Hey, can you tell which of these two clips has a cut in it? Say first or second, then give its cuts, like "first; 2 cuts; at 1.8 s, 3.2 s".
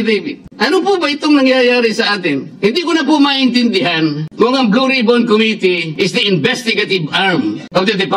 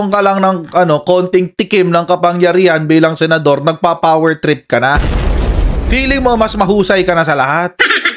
first; 2 cuts; at 2.5 s, 5.9 s